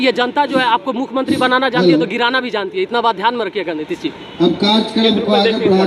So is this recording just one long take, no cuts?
yes; 0 cuts

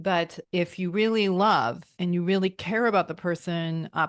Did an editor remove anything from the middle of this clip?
yes; 1 cut; at 1.9 s

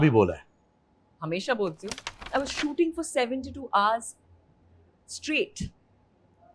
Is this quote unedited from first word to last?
no; 1 cut; at 2.2 s

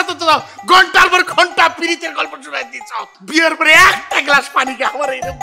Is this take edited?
yes; 1 cut; at 3.2 s

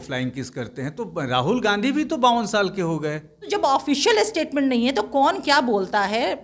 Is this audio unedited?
no; 1 cut; at 3.3 s

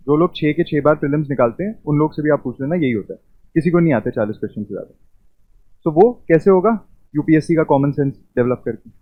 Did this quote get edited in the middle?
no; 0 cuts

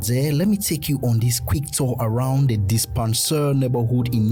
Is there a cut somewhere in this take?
no; 0 cuts

